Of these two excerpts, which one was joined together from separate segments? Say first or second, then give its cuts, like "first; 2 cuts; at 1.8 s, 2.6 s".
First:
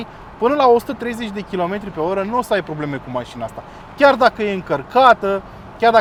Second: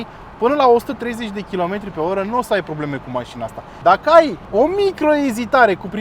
second; 2 cuts; at 3.7 s, 4.4 s